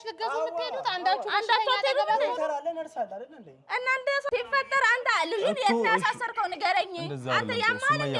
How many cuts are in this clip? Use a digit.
1